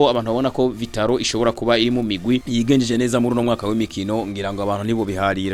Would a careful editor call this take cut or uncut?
uncut